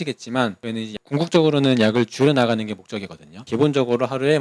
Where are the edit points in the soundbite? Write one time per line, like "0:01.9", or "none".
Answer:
0:03.4